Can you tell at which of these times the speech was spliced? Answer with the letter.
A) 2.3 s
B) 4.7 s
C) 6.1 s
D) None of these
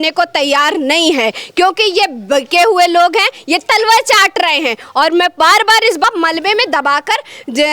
C